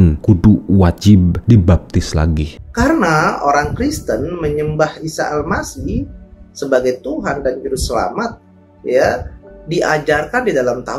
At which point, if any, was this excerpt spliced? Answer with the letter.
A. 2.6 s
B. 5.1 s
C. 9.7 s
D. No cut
A